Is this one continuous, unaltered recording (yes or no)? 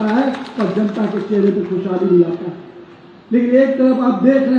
yes